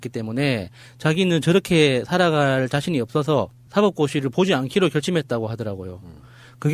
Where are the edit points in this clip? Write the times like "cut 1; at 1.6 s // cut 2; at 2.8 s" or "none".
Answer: none